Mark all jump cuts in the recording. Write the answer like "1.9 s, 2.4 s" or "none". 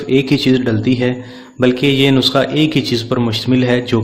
none